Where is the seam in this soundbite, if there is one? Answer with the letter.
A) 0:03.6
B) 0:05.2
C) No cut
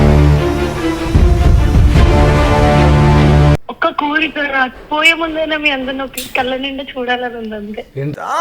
A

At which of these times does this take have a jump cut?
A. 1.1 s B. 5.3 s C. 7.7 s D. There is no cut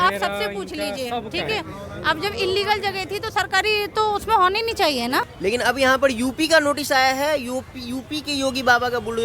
B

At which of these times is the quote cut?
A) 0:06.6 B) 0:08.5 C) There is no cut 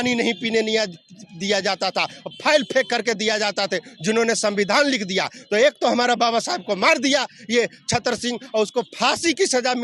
C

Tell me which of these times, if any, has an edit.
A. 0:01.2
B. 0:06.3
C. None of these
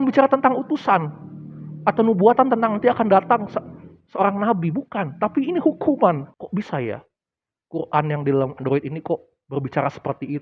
B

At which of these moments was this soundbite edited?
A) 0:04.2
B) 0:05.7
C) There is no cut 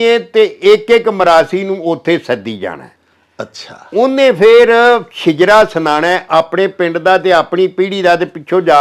C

